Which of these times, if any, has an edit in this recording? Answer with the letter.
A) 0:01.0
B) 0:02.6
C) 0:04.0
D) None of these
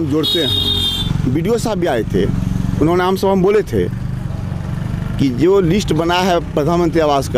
A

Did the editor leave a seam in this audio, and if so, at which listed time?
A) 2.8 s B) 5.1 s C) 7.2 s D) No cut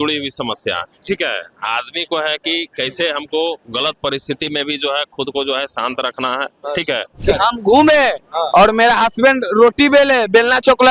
C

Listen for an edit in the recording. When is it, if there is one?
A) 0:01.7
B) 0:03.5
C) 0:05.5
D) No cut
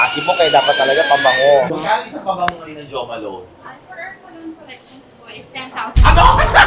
A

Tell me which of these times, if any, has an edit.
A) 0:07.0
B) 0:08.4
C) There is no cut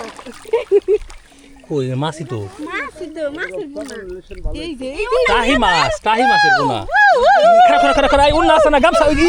C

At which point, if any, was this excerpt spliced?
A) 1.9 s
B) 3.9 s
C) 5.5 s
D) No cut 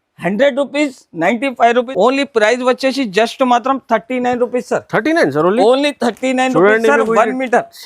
A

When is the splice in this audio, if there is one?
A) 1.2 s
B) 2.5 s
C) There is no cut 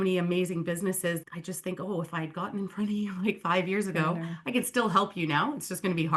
A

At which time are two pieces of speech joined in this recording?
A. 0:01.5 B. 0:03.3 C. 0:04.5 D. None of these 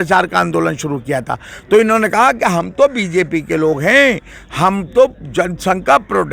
D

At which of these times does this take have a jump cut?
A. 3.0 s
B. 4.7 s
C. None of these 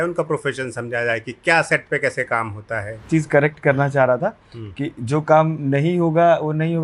A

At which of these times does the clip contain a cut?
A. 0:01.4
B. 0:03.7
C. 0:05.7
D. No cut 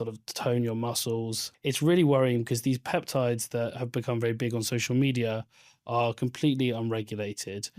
A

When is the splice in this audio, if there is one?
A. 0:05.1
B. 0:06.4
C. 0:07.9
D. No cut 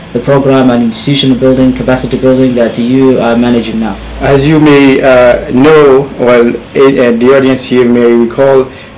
D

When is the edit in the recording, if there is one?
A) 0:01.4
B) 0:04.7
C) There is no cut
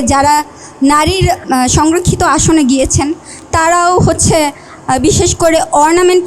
A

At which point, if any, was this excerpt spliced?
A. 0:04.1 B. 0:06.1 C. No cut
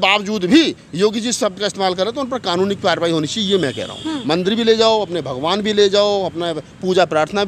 A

